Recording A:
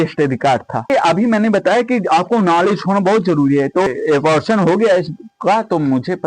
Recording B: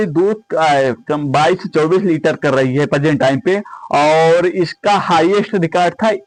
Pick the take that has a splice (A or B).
A